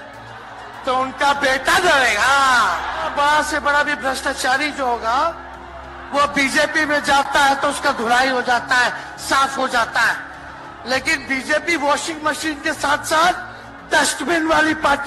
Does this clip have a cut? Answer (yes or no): yes